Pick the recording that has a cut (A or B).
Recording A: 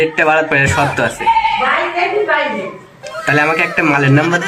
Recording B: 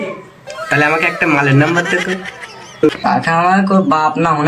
B